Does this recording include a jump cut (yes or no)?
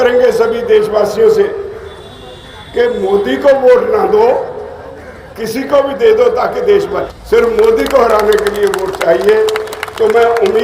yes